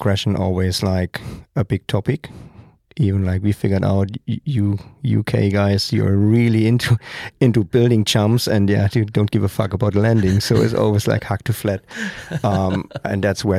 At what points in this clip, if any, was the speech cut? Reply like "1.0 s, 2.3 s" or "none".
none